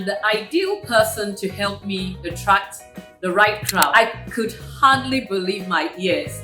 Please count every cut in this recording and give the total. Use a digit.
1